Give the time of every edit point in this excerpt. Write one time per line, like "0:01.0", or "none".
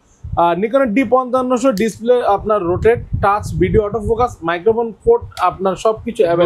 none